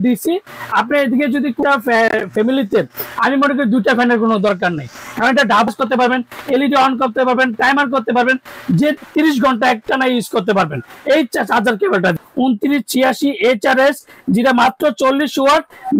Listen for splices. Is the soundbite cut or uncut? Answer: cut